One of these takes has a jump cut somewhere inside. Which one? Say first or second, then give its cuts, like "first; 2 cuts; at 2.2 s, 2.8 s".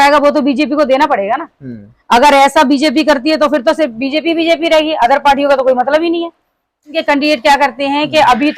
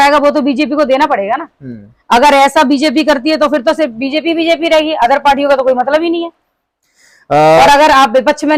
first; 1 cut; at 7.0 s